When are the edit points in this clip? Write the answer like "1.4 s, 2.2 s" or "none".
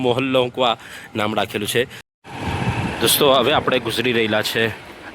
2.0 s

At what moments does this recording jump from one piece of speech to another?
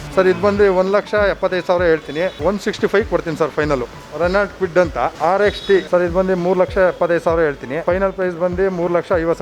4.0 s, 5.1 s, 5.9 s, 7.8 s

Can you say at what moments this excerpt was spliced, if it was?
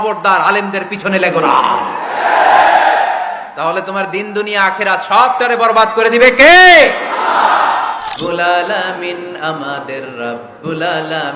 8.1 s

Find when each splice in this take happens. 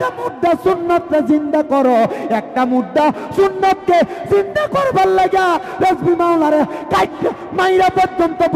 none

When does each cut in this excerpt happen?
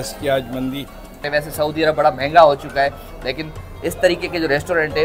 1.2 s

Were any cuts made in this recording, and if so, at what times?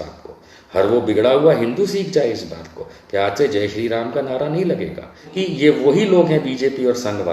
5.3 s

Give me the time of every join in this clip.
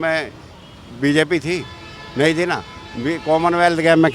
none

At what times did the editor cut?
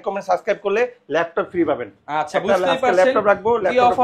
none

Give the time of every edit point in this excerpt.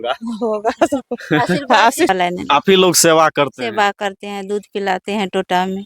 2.1 s

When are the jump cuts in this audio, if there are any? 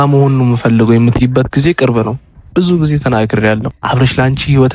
2.3 s, 3.7 s

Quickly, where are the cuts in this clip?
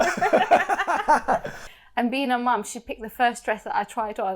1.5 s

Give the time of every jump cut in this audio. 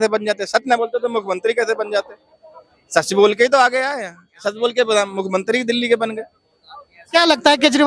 none

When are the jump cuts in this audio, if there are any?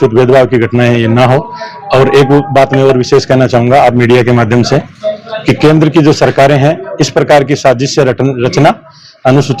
none

